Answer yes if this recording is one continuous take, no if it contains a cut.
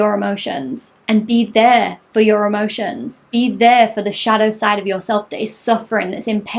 yes